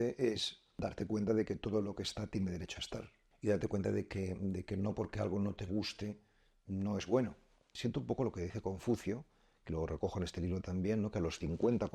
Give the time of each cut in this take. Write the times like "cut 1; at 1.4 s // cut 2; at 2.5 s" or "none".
cut 1; at 0.9 s // cut 2; at 3.2 s // cut 3; at 7.7 s